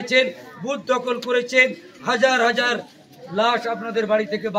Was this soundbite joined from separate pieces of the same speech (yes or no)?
no